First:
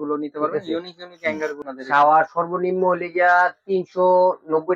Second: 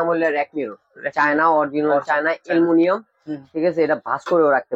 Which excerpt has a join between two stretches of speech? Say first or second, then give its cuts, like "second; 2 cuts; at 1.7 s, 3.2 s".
first; 1 cut; at 1.6 s